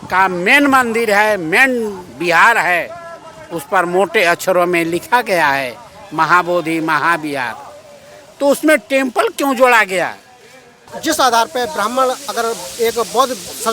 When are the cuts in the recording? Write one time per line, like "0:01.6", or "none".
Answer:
0:11.0

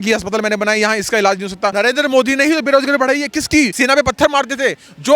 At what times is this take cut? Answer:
0:01.7
0:03.7

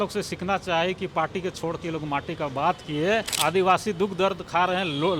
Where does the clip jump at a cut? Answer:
0:03.3

